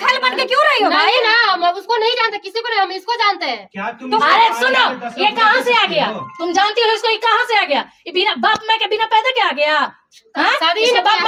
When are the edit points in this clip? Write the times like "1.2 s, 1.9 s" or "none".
none